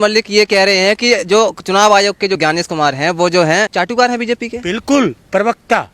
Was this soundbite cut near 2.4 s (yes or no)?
yes